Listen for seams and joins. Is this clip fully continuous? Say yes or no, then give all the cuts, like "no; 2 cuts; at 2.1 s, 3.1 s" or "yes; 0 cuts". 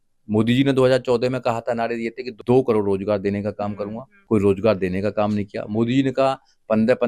no; 2 cuts; at 2.3 s, 4.1 s